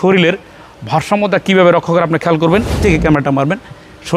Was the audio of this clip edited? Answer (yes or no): yes